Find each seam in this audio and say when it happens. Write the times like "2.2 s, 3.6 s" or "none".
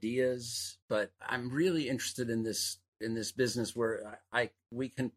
none